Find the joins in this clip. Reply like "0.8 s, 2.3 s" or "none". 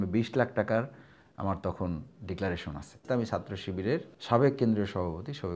3.0 s, 4.1 s